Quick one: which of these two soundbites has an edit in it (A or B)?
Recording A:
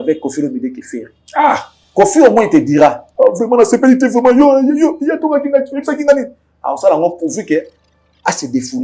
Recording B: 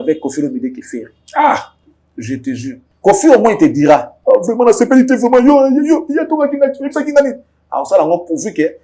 A